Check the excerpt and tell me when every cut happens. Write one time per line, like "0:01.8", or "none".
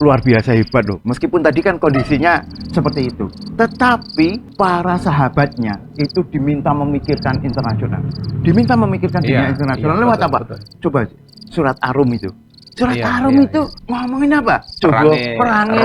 0:04.4
0:13.8
0:14.7